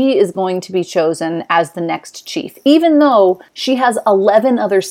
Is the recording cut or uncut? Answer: cut